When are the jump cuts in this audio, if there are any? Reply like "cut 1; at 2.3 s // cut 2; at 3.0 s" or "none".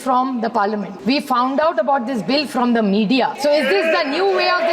cut 1; at 0.9 s // cut 2; at 3.4 s